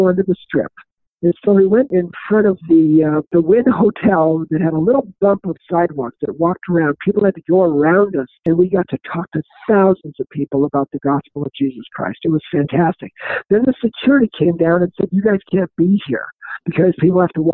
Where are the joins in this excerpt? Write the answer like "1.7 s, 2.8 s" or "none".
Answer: 1.9 s, 3.3 s, 8.3 s

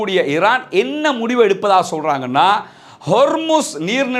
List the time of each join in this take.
none

